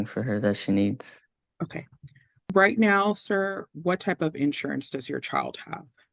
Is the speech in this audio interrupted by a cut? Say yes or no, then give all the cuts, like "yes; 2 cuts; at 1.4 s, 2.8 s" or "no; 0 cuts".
no; 0 cuts